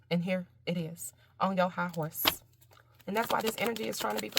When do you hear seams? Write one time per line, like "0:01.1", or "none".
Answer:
0:03.4